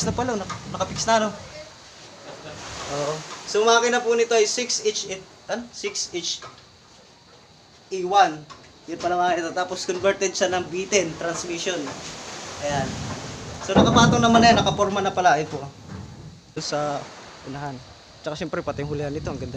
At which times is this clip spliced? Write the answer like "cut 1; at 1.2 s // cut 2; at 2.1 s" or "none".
cut 1; at 16.6 s